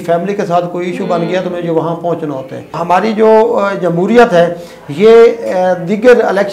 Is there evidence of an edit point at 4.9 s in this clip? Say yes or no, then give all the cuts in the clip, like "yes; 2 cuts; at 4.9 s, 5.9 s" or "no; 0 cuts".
no; 1 cut; at 2.8 s